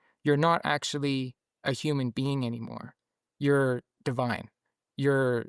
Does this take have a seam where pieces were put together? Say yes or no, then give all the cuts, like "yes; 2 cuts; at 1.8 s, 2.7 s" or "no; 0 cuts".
no; 0 cuts